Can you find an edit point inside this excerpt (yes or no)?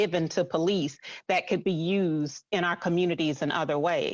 yes